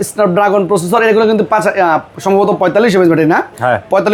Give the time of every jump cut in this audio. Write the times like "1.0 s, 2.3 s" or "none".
none